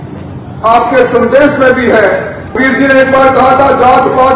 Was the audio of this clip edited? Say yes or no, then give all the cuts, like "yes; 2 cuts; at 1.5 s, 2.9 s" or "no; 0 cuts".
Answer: yes; 1 cut; at 2.6 s